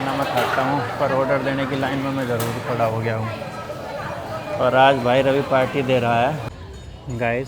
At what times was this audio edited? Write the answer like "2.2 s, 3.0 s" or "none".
6.4 s